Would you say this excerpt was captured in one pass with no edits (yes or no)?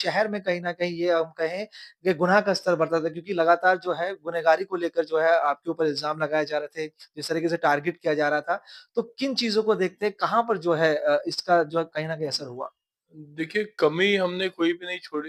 yes